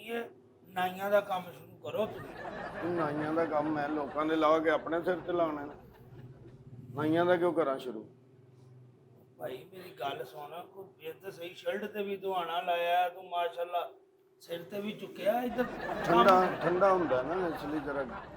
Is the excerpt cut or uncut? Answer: uncut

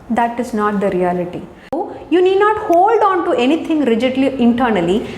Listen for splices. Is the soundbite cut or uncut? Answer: cut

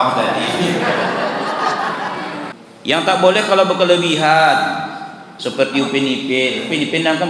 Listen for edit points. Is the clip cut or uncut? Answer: cut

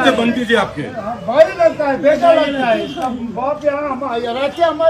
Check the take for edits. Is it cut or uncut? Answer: uncut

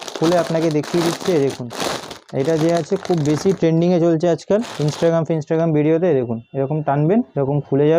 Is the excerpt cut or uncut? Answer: uncut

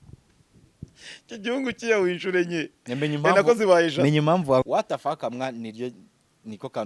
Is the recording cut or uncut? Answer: cut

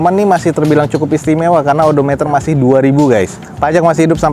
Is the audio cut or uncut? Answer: uncut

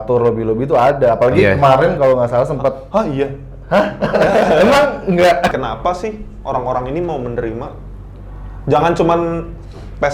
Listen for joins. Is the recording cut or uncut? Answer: cut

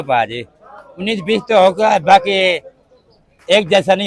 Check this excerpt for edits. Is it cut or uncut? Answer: uncut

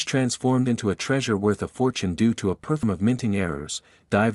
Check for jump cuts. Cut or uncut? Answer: cut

